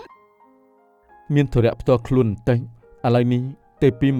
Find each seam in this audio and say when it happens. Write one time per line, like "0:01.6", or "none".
none